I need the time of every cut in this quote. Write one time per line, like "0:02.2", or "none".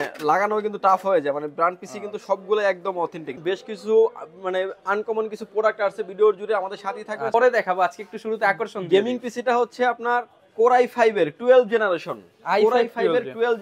0:03.4
0:07.3